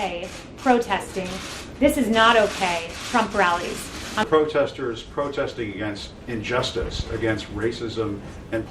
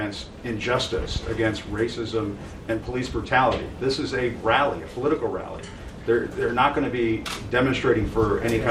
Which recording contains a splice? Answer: first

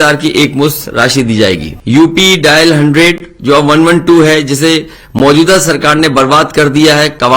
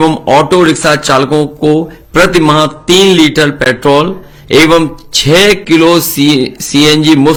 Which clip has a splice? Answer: first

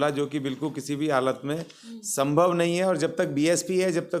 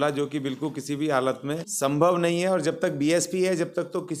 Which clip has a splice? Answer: second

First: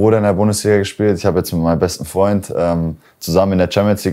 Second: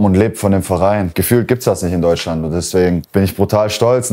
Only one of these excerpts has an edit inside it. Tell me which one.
second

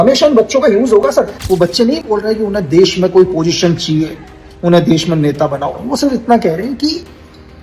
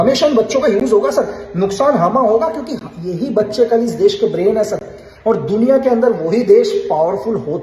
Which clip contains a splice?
first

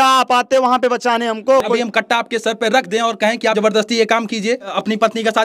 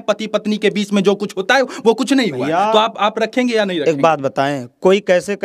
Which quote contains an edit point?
first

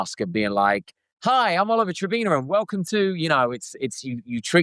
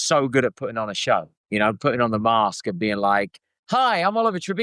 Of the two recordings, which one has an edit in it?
second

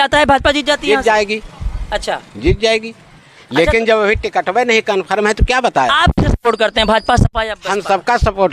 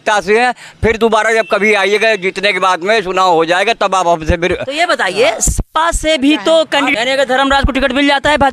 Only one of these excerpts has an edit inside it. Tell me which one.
second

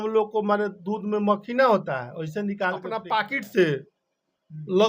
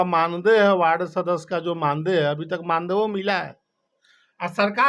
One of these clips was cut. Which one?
first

